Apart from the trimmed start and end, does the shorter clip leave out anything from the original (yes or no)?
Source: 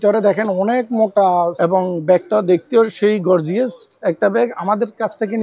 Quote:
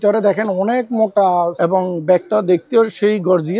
no